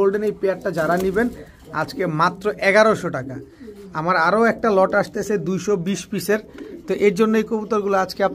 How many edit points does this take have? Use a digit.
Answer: 0